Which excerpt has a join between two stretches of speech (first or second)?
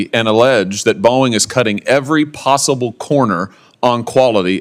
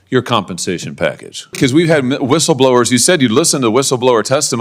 second